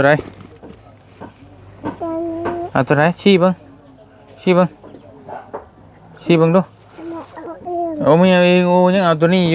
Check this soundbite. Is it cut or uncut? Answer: uncut